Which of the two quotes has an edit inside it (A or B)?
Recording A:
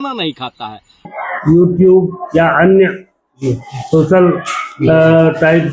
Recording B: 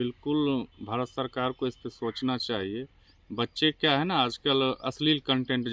A